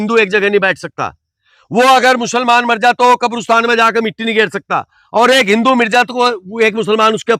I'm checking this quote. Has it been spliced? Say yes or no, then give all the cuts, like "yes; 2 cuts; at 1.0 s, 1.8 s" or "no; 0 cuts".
no; 0 cuts